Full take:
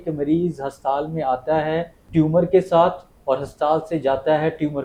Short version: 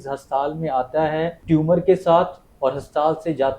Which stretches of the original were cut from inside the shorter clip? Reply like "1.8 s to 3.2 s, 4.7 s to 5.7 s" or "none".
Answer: 1.9 s to 2.0 s